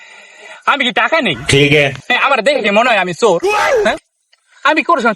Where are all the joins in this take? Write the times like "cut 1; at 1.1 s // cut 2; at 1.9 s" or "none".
cut 1; at 1.4 s // cut 2; at 2.1 s